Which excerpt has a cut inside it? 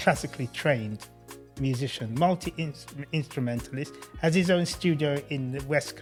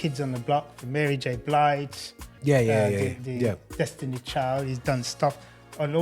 second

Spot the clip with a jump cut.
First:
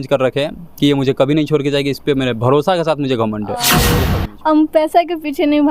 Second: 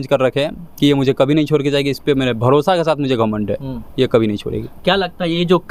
first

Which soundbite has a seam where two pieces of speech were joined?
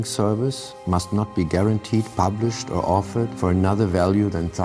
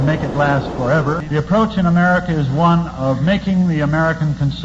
second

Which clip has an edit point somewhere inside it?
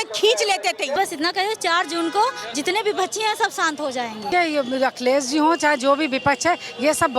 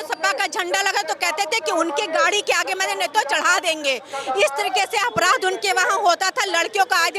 first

